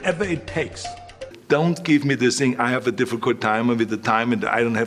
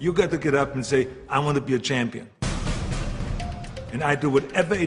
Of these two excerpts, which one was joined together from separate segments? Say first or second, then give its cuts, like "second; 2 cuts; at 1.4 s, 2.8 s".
first; 1 cut; at 1.3 s